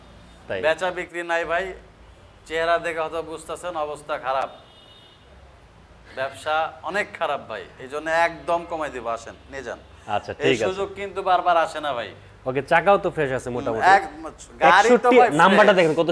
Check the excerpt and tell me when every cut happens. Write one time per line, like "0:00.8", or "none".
none